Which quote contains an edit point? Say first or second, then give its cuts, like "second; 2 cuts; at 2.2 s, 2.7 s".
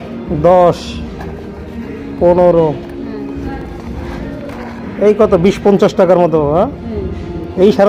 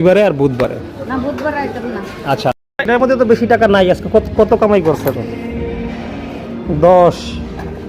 second; 1 cut; at 2.5 s